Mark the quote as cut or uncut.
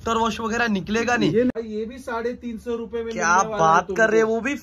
cut